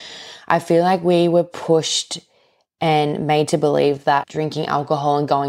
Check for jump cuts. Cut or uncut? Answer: cut